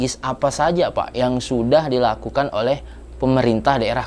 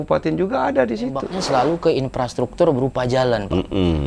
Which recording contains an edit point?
second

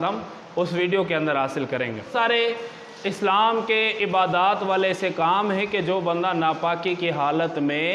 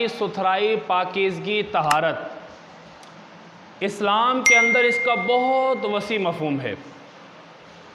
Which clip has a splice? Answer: first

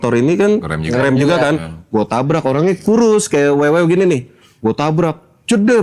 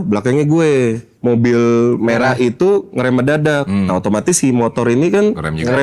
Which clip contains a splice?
second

